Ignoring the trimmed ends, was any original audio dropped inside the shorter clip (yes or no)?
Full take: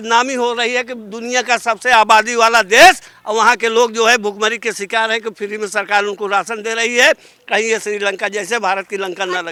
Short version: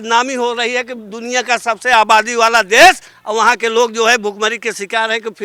no